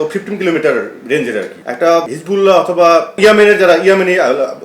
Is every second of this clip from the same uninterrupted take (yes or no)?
no